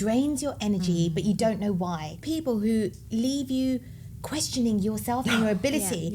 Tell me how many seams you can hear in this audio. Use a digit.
1